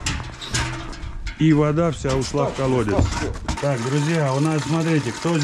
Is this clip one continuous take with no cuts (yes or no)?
no